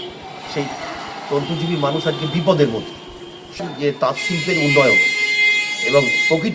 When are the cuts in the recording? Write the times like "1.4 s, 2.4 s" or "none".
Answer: 3.6 s